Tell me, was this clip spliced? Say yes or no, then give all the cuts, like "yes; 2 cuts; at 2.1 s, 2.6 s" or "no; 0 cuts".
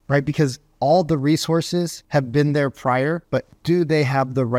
yes; 2 cuts; at 2.0 s, 3.5 s